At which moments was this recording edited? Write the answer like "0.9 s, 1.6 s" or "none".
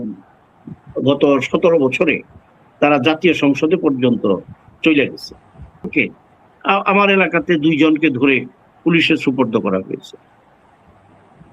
5.9 s